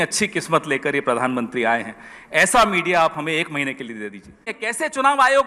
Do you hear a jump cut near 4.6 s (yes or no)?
yes